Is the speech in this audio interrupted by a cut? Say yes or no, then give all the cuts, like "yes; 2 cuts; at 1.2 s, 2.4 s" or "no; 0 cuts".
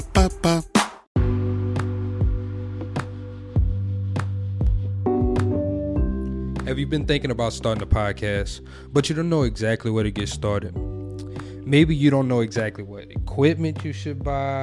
yes; 1 cut; at 1.0 s